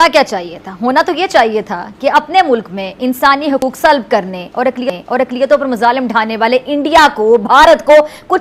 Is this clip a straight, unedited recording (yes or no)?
yes